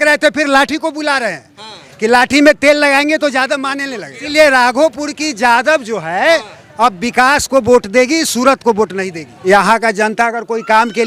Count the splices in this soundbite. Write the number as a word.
two